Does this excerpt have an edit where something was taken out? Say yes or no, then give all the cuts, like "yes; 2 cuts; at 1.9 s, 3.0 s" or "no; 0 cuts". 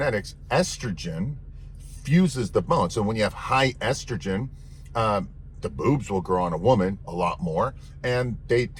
no; 0 cuts